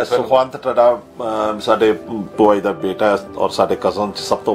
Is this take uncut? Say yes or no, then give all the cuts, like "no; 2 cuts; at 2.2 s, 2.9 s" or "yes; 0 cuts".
yes; 0 cuts